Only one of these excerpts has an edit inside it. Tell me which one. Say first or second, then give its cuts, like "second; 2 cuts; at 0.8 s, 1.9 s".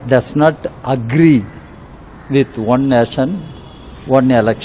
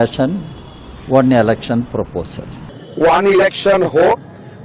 second; 1 cut; at 2.6 s